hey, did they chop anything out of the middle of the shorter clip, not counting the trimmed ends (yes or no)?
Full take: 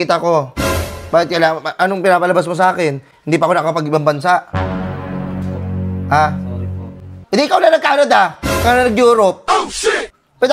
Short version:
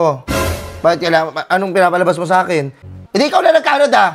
yes